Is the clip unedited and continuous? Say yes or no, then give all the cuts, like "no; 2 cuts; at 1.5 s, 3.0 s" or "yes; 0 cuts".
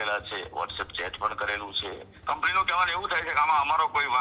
no; 1 cut; at 2.1 s